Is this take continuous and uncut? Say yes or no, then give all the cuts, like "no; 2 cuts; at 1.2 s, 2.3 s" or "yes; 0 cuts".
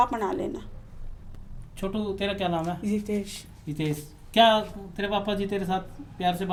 yes; 0 cuts